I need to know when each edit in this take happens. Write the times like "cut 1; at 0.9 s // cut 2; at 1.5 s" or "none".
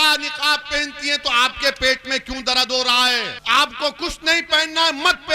cut 1; at 3.4 s